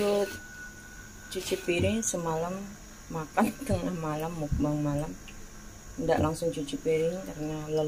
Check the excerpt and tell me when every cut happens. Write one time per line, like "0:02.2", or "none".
none